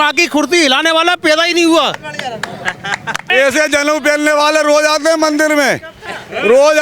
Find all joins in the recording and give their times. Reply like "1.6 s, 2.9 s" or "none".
3.3 s